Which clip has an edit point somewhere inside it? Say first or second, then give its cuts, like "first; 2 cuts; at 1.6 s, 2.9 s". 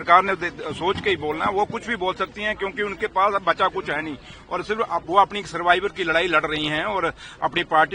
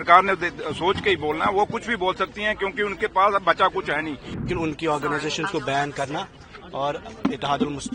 second; 1 cut; at 4.3 s